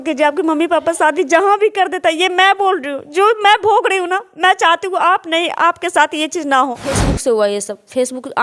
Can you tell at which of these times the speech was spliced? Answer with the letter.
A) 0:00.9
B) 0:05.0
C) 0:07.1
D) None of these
C